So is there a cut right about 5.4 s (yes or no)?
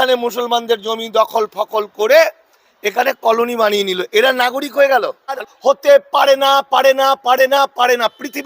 yes